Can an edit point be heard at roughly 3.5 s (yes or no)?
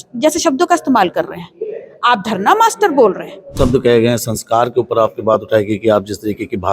yes